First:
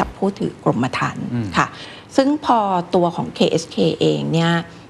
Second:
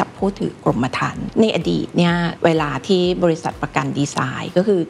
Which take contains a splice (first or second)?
second